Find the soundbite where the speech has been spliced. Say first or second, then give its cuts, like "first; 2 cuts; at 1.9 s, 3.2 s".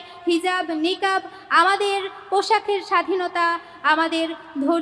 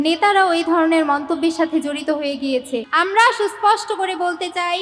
second; 1 cut; at 2.9 s